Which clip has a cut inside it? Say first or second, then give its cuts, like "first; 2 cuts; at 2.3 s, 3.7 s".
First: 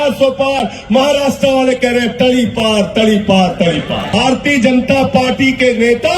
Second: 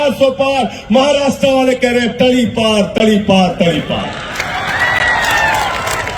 first; 1 cut; at 4.1 s